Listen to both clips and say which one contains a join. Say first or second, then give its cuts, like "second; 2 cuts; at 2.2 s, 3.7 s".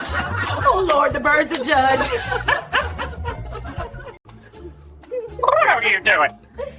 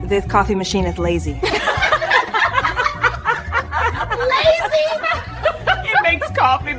first; 1 cut; at 4.3 s